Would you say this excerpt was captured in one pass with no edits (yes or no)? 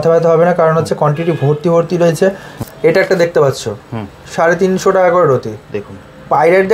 no